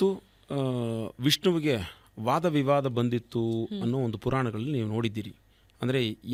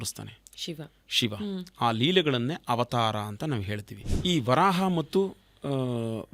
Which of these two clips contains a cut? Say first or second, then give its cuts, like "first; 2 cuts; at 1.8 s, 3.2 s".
second; 1 cut; at 4.1 s